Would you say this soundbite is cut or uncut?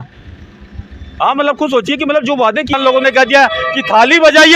cut